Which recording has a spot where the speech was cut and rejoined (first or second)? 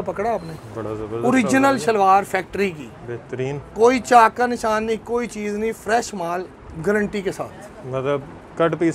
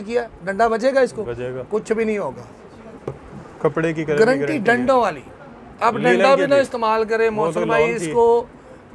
second